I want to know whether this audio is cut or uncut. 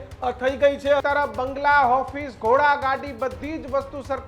cut